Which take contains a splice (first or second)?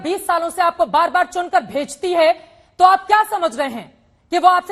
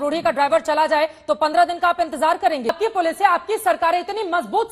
second